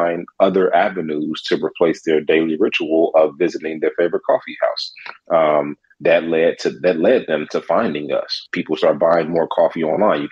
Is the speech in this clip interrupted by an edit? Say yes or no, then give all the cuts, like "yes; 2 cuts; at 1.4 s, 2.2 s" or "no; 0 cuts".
yes; 1 cut; at 8.5 s